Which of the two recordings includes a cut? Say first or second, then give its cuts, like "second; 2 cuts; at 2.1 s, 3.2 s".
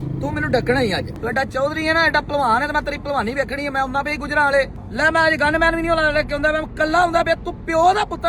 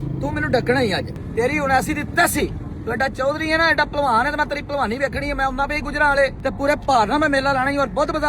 first; 2 cuts; at 1.1 s, 4.8 s